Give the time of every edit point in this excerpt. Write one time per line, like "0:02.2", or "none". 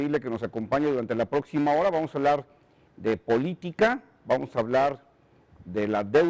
none